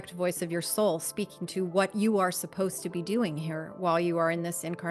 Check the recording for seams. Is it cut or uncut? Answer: uncut